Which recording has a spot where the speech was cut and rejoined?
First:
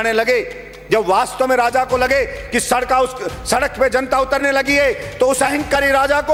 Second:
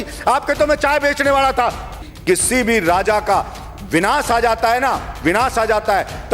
second; 1 cut; at 2.1 s

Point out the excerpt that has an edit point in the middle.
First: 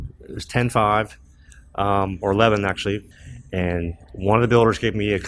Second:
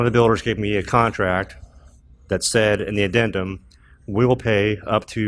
first; 1 cut; at 3.1 s

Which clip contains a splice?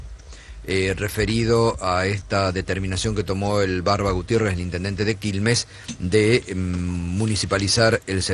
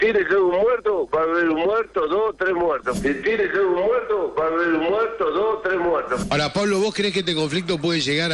second; 1 cut; at 6.2 s

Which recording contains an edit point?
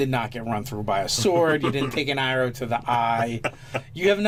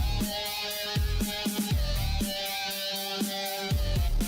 second; 1 cut; at 2.7 s

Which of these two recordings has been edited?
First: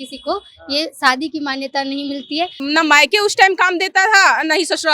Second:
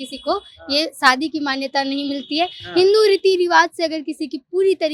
first; 1 cut; at 2.6 s

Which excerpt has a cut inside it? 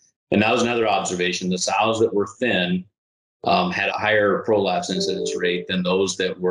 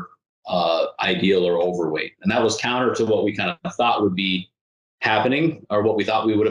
first; 1 cut; at 3.9 s

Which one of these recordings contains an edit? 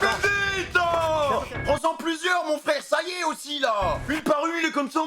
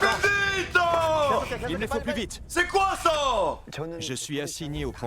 first; 1 cut; at 1.5 s

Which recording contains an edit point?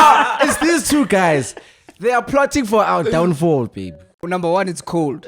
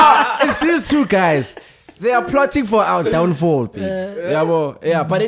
first; 1 cut; at 4.2 s

